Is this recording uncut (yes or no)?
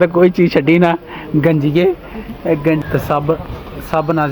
no